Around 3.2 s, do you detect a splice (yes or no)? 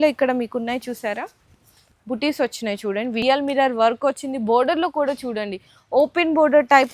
yes